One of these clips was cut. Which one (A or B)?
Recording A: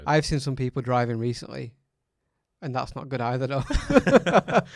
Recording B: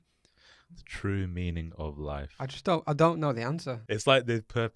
B